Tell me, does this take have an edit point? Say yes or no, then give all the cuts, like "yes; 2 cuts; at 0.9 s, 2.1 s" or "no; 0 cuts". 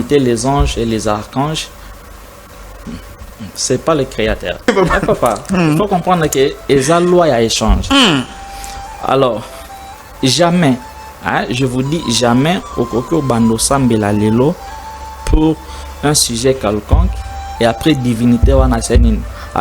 yes; 1 cut; at 4.7 s